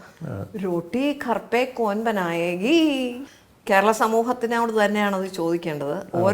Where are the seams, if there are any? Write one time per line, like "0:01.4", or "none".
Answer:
0:03.2